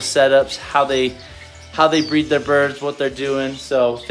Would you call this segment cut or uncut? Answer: uncut